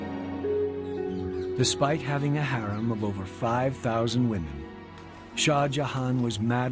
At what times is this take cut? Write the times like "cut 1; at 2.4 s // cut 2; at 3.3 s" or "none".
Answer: none